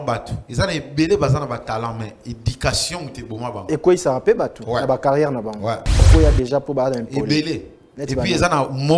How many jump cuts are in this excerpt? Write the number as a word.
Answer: one